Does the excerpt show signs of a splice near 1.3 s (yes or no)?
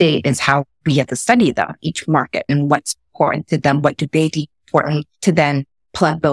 no